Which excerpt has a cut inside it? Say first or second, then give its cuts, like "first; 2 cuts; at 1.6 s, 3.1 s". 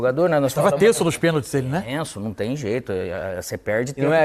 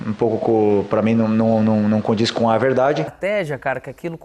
second; 1 cut; at 3.1 s